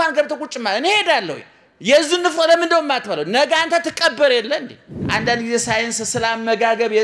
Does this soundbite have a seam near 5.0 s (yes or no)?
yes